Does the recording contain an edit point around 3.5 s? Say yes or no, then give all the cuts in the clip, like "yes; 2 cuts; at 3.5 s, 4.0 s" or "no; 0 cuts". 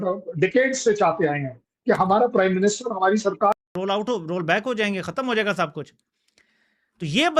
yes; 1 cut; at 3.5 s